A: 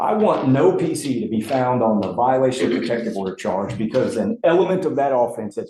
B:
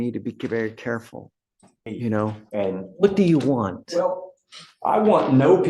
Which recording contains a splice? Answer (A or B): B